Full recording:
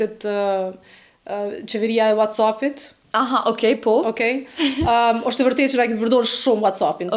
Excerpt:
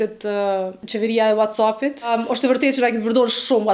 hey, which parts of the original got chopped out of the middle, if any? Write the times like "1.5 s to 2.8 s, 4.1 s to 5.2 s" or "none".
0.8 s to 1.6 s, 2.9 s to 5.0 s

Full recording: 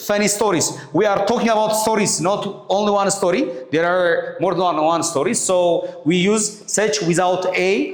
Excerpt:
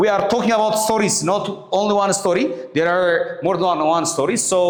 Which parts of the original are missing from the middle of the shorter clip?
none

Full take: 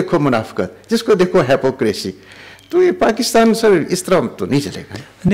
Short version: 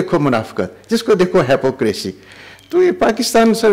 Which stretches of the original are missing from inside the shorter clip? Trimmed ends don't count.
none

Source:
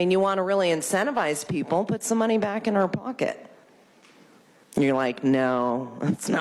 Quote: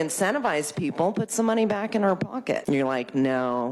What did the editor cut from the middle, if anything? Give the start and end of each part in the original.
3.3 s to 4.7 s

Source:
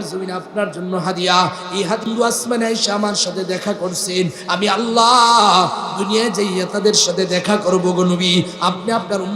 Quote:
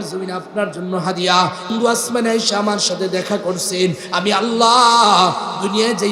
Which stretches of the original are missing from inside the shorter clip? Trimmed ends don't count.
1.7 s to 2.0 s

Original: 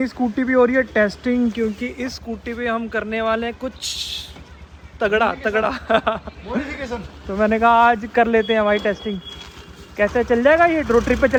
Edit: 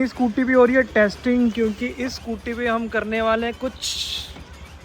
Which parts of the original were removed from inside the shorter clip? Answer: none

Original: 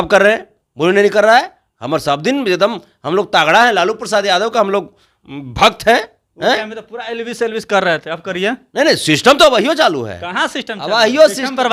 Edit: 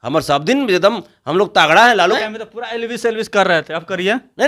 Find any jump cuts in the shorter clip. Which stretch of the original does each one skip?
4.0 s to 6.6 s

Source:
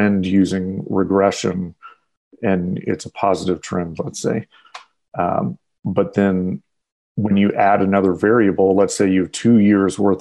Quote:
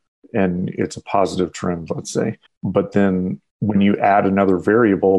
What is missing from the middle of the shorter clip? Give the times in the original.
4.6 s to 5.7 s, 6.7 s to 7.0 s

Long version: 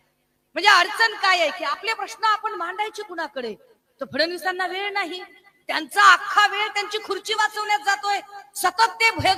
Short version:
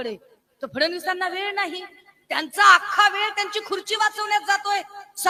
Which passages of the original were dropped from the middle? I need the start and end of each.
none

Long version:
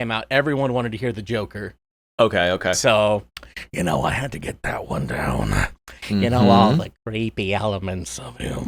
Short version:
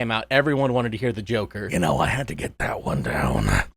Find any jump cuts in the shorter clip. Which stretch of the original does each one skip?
1.6 s to 3.6 s

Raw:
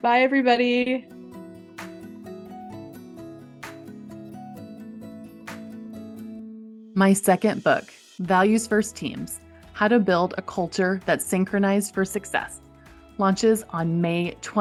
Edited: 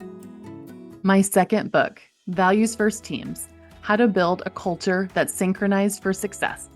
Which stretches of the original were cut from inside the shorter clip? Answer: 3.2 s to 6.9 s

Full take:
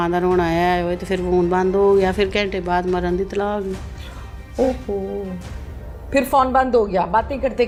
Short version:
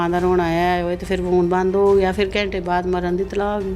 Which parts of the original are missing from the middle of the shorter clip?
none

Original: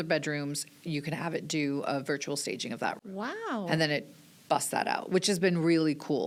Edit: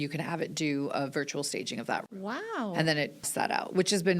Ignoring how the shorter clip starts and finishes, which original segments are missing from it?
4.2 s to 4.7 s

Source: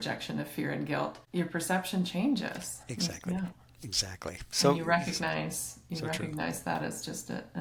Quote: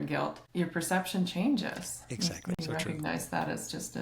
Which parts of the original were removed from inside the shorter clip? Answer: 3.3 s to 5.9 s

